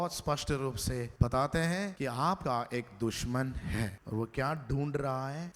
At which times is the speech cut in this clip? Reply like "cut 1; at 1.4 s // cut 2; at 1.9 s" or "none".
cut 1; at 1.1 s // cut 2; at 2.3 s // cut 3; at 4.0 s